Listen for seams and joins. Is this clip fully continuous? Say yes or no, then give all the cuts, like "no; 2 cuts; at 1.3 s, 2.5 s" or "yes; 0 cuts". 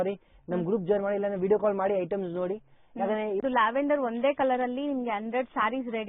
no; 1 cut; at 3.4 s